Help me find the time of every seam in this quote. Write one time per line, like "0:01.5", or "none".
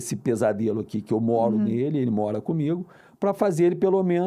none

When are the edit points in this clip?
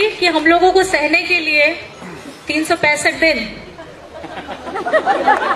none

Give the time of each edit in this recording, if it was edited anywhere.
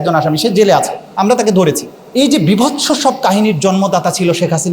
0:01.9

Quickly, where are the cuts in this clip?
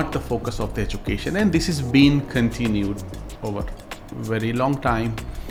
none

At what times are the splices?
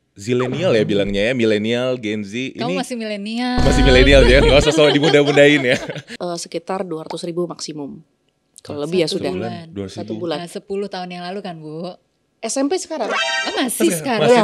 0:06.1

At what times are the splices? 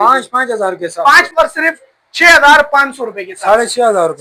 0:01.3

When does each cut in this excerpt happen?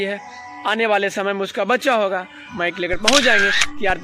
0:02.5

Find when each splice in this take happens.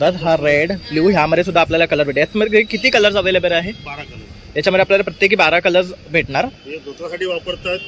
none

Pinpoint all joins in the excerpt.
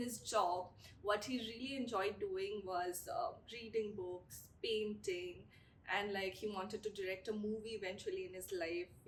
none

